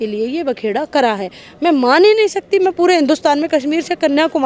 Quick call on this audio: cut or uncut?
uncut